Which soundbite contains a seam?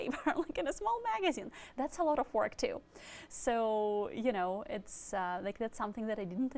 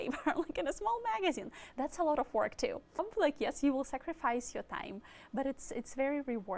second; 1 cut; at 3.1 s

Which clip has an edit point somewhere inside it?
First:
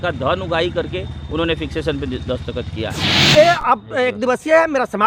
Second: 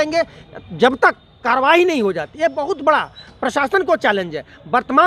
first; 1 cut; at 3.1 s

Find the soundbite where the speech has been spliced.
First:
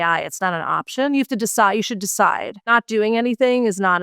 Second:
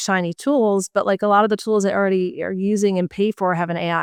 first; 1 cut; at 2.5 s

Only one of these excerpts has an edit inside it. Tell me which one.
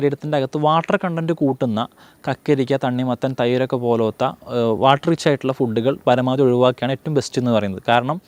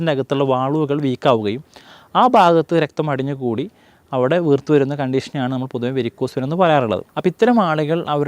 second; 1 cut; at 7.1 s

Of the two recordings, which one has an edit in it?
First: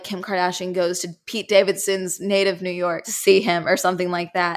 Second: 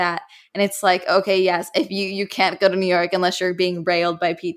first; 1 cut; at 3.1 s

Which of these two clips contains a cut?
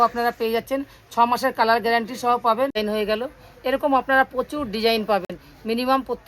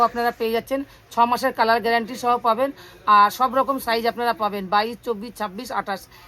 first; 1 cut; at 2.8 s

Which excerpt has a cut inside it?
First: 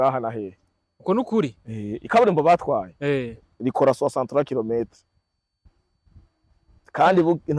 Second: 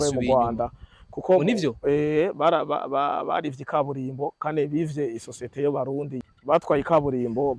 second; 1 cut; at 6.2 s

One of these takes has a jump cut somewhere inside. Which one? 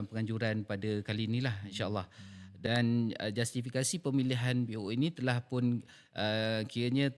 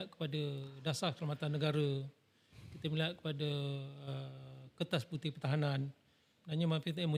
first; 1 cut; at 2.4 s

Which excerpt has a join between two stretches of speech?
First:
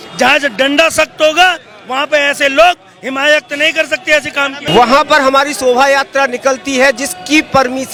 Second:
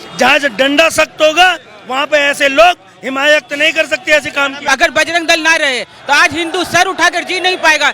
second; 1 cut; at 4.6 s

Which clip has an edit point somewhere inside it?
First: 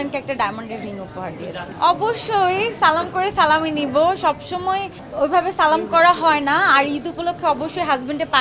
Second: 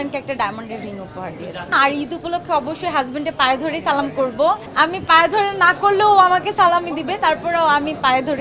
second; 2 cuts; at 1.7 s, 4.7 s

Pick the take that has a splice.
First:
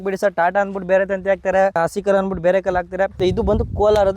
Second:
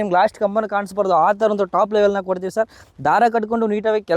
first; 2 cuts; at 1.8 s, 3.2 s

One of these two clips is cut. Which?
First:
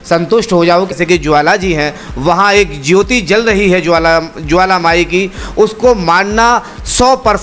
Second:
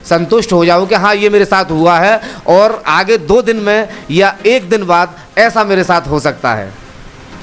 first; 1 cut; at 0.9 s

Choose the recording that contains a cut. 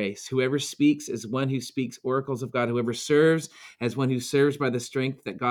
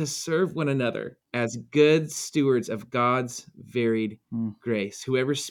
second; 1 cut; at 1.2 s

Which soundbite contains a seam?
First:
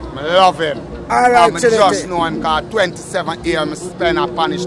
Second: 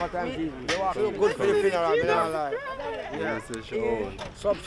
second; 1 cut; at 0.9 s

